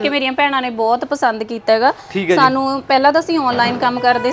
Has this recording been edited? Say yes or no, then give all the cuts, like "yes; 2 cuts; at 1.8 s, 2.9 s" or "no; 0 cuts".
no; 0 cuts